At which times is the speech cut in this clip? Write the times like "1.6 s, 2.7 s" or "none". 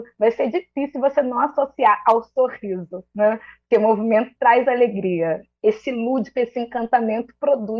none